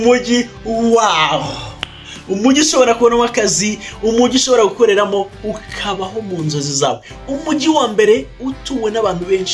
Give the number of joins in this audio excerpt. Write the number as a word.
zero